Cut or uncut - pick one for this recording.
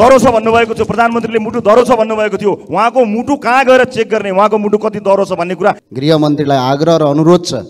cut